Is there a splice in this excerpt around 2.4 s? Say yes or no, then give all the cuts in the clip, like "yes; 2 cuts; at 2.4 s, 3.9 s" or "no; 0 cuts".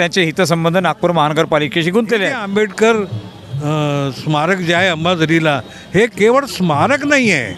yes; 1 cut; at 2.4 s